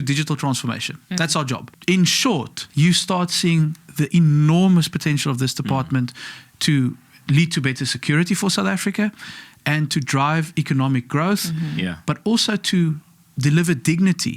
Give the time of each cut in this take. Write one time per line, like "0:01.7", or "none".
0:01.7
0:02.6

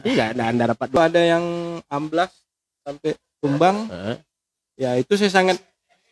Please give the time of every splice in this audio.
0:01.0

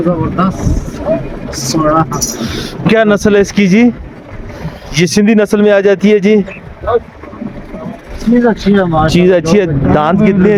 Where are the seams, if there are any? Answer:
none

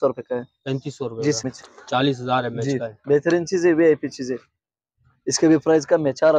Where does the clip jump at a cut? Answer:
0:01.4

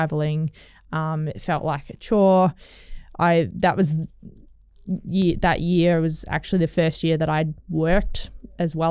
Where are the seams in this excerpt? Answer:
none

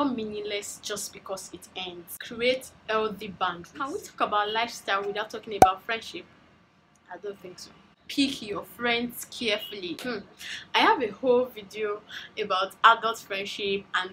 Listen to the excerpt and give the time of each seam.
none

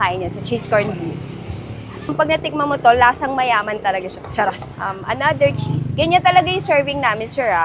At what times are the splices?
0:02.1
0:04.7

